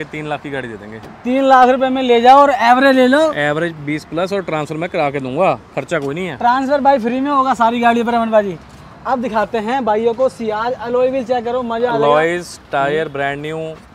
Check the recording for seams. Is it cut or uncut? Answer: uncut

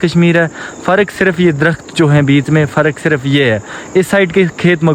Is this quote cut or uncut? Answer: uncut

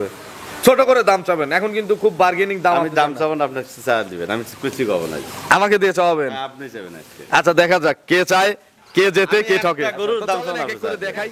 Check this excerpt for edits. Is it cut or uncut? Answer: uncut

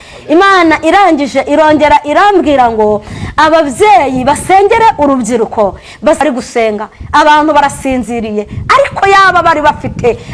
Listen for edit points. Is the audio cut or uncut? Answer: cut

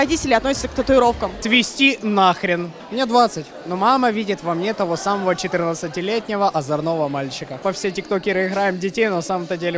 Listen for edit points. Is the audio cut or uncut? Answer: cut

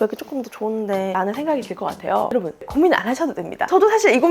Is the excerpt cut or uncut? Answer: cut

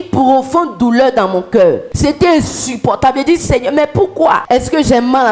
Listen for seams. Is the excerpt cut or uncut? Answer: cut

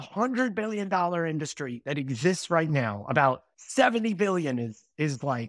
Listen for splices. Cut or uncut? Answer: cut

